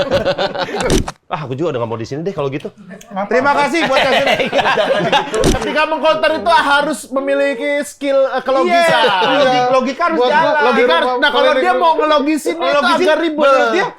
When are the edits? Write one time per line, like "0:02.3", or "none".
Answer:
0:00.9
0:05.5